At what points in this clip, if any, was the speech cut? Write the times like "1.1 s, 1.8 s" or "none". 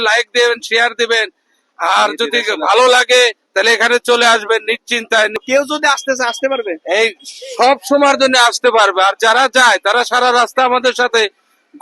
5.4 s